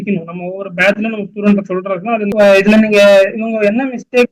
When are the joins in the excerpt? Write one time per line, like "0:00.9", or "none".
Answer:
0:02.3